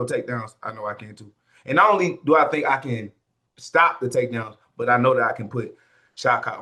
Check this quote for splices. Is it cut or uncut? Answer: uncut